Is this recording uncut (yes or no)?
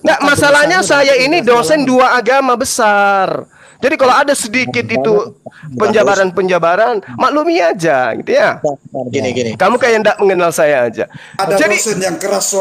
yes